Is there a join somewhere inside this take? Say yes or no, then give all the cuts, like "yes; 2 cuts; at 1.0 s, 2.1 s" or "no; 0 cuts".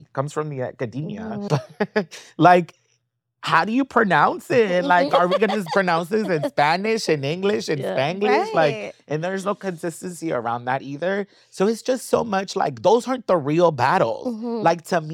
yes; 2 cuts; at 1.4 s, 5.1 s